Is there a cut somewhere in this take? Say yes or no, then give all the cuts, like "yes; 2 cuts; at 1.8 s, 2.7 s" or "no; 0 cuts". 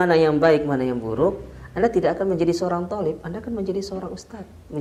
no; 0 cuts